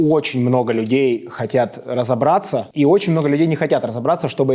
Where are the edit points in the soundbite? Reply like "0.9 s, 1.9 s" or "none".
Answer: 2.7 s